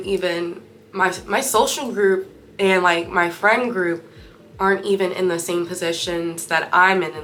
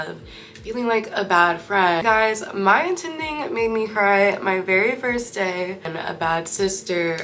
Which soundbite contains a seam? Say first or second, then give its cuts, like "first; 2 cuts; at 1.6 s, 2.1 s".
second; 2 cuts; at 2.0 s, 6.0 s